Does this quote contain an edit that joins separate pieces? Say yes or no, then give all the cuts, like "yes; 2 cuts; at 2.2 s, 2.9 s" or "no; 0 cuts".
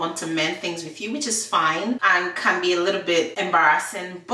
yes; 2 cuts; at 2.0 s, 3.3 s